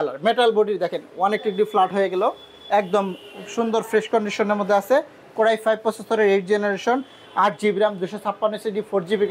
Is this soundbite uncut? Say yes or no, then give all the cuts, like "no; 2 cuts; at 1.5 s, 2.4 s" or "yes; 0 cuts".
yes; 0 cuts